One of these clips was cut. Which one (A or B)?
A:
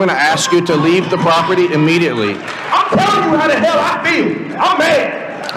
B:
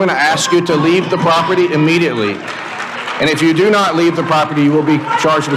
A